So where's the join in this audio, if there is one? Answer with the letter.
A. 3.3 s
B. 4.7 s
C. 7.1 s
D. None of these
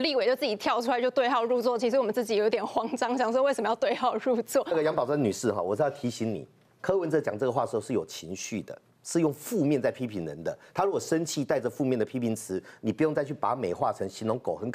B